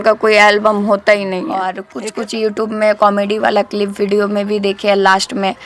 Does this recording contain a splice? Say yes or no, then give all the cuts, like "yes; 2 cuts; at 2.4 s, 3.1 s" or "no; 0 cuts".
yes; 1 cut; at 1.8 s